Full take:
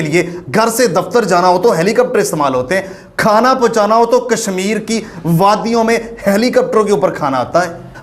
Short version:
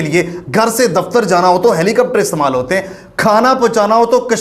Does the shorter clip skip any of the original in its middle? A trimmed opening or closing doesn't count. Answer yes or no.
no